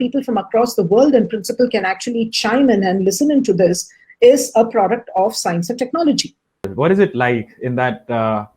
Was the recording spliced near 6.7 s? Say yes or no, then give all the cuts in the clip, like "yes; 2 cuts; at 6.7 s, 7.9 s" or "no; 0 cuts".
yes; 1 cut; at 6.7 s